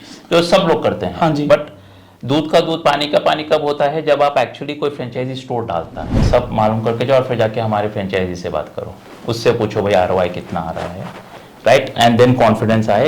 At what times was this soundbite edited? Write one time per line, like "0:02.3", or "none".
0:06.2